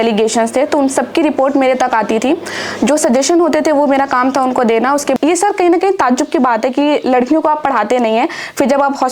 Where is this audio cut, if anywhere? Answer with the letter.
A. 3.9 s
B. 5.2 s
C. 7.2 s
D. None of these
B